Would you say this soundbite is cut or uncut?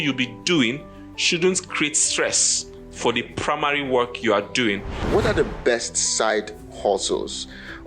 cut